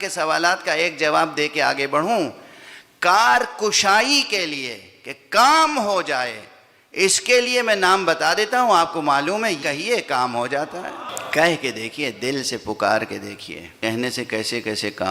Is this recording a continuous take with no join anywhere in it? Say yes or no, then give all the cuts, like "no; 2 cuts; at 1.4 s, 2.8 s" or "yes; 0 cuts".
no; 3 cuts; at 9.6 s, 11.1 s, 13.8 s